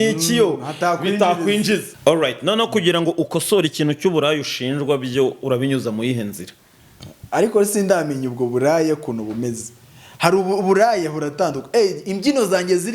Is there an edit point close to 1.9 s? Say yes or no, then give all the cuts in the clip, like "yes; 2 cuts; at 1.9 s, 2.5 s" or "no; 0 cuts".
yes; 1 cut; at 1.9 s